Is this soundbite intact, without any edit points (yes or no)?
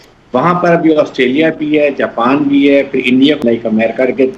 no